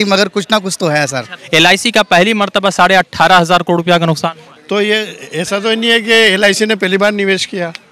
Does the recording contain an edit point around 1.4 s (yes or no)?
yes